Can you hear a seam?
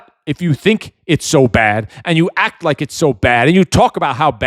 no; 0 cuts

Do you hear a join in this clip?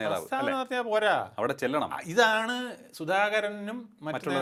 no; 0 cuts

